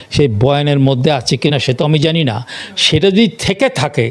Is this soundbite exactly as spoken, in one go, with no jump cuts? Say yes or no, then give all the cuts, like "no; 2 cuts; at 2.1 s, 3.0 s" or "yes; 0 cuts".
yes; 0 cuts